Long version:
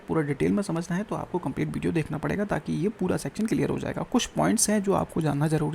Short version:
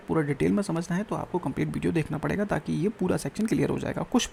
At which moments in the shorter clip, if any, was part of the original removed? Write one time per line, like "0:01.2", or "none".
none